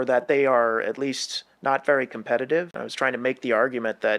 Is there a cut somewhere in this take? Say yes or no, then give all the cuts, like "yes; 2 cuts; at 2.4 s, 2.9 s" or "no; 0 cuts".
yes; 1 cut; at 2.7 s